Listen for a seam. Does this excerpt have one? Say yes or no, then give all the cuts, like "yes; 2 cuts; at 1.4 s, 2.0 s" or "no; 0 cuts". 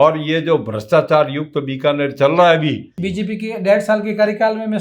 yes; 1 cut; at 2.9 s